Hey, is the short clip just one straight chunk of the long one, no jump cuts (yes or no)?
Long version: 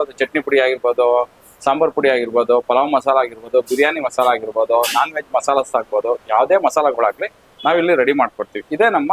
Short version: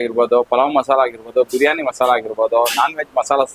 yes